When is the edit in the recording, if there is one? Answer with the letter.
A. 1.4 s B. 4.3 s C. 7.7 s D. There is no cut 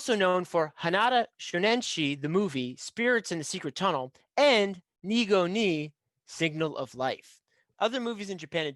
C